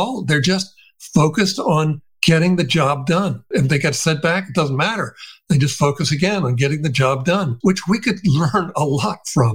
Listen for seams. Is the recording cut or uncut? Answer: cut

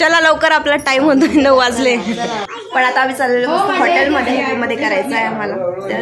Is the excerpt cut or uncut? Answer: cut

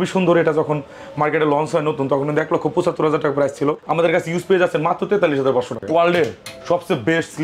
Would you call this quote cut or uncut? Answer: cut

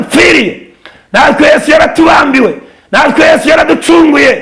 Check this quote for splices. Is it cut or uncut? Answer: uncut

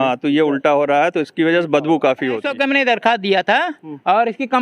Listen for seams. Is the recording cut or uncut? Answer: cut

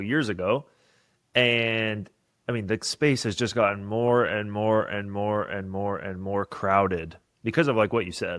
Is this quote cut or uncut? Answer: uncut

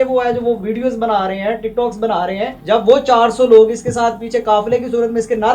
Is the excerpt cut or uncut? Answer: cut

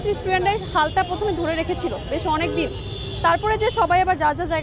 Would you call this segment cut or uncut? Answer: uncut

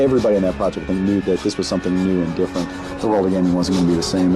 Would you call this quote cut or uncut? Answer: cut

